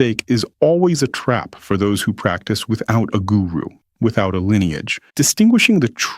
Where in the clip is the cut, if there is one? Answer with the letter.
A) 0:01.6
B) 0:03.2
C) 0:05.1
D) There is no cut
C